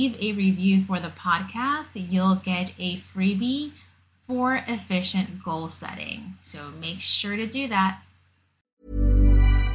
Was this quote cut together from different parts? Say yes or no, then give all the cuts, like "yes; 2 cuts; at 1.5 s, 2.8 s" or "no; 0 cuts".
yes; 1 cut; at 8.5 s